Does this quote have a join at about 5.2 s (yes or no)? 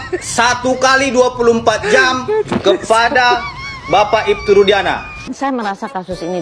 yes